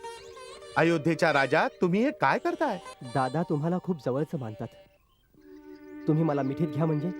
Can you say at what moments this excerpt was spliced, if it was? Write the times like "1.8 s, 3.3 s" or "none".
2.9 s